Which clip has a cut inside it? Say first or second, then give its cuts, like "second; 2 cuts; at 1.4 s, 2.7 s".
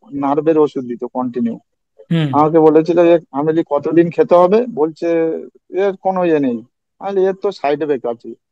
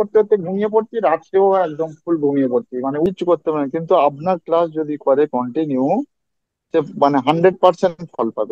second; 1 cut; at 3.1 s